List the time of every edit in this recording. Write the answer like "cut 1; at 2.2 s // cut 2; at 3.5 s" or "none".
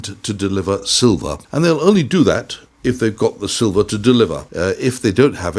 cut 1; at 1.4 s // cut 2; at 4.5 s

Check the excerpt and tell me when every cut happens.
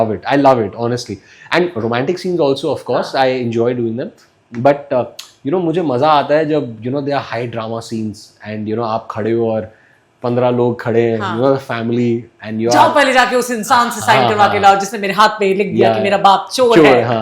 none

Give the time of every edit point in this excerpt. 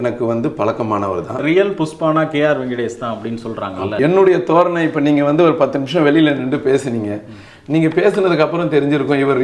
cut 1; at 1.4 s // cut 2; at 4.0 s

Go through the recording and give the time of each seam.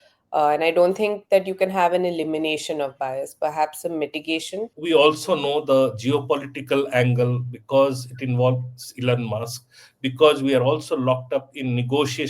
cut 1; at 4.7 s

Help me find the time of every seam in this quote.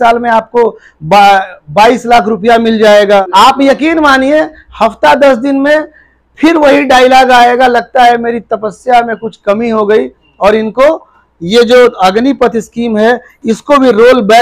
cut 1; at 3.3 s

